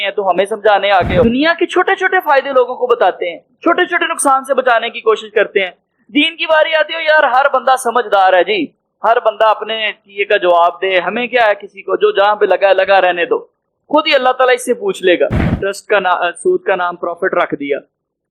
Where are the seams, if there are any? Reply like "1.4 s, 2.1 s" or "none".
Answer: 1.2 s, 15.5 s